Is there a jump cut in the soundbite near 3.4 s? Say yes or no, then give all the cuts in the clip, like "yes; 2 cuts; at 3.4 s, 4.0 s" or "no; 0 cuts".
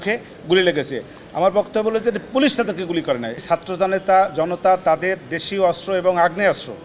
yes; 1 cut; at 3.4 s